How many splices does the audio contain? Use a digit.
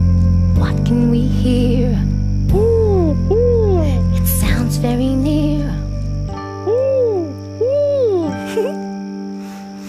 1